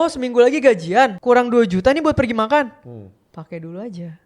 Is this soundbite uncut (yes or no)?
no